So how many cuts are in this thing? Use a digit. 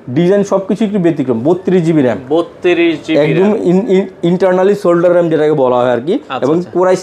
0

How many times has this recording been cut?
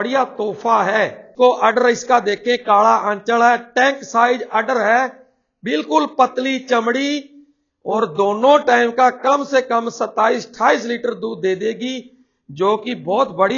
1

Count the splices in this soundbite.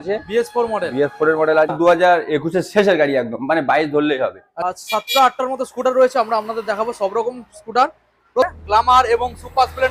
3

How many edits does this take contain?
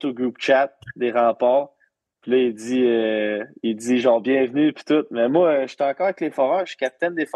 0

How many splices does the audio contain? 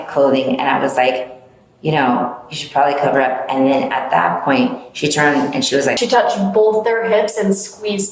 1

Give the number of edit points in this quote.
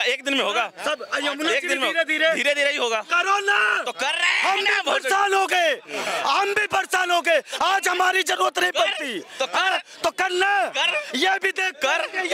0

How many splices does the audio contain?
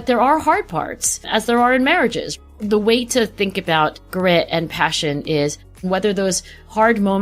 3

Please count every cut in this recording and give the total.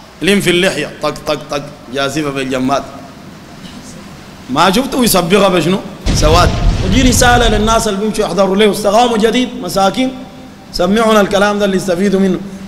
1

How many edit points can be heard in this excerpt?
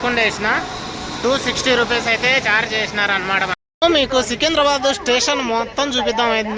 1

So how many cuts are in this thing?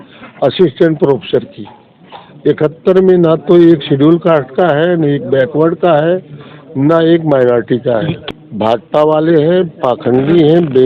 1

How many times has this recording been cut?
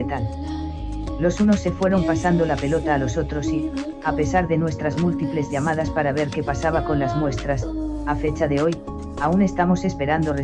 0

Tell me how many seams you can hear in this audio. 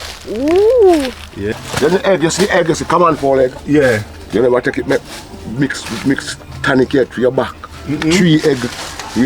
1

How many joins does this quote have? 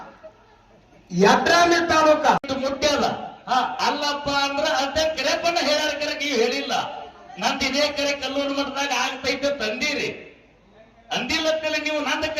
1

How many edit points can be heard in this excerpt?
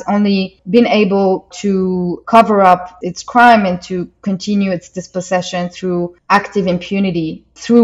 0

